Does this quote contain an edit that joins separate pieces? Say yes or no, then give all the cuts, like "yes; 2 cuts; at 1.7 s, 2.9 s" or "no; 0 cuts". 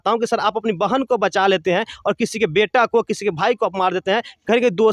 no; 0 cuts